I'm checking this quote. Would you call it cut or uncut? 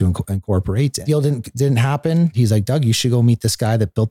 cut